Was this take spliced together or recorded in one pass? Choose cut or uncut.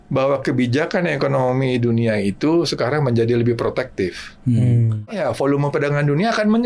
cut